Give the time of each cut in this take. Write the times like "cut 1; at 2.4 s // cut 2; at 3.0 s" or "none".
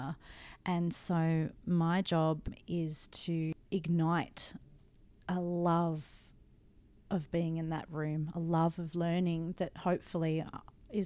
cut 1; at 2.6 s // cut 2; at 3.5 s

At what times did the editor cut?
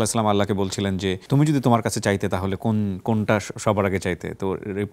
cut 1; at 1.2 s

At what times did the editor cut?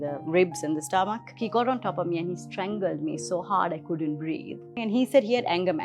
cut 1; at 1.3 s // cut 2; at 4.8 s

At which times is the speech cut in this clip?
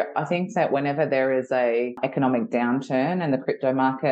cut 1; at 2.0 s

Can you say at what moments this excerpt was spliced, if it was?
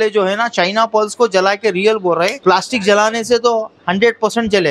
cut 1; at 2.4 s

